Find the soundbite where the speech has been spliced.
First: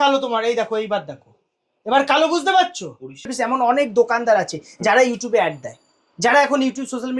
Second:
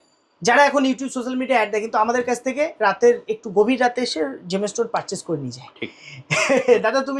first; 1 cut; at 3.3 s

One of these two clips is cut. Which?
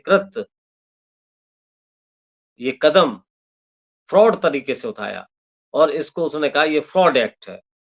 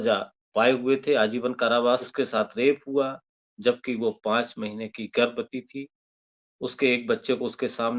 second; 1 cut; at 2.1 s

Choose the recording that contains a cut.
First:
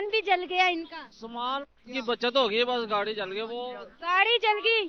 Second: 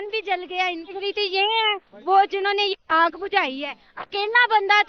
second; 1 cut; at 0.9 s

